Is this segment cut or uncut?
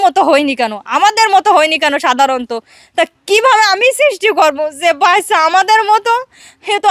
uncut